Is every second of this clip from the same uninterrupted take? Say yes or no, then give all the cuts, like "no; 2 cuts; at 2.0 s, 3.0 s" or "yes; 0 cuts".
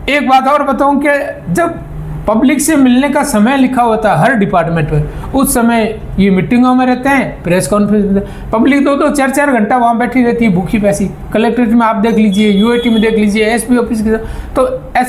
yes; 0 cuts